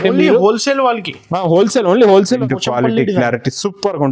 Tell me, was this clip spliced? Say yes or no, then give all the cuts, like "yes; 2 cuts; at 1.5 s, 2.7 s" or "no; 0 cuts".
yes; 1 cut; at 2.4 s